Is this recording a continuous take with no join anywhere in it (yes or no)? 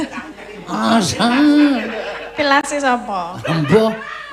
yes